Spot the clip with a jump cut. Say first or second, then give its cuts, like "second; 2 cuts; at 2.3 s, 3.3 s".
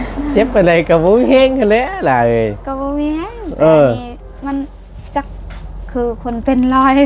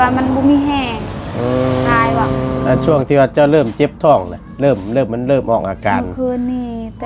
second; 1 cut; at 2.6 s